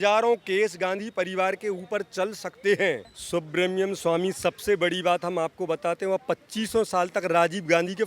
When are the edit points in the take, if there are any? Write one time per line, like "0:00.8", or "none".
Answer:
0:03.1